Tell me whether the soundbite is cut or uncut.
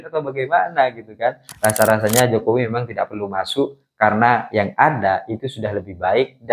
cut